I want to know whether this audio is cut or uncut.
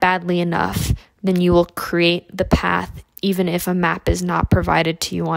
uncut